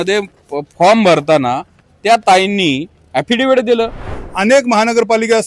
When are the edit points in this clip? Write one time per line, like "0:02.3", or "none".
0:04.1